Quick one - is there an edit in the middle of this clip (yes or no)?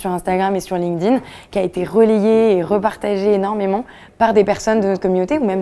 no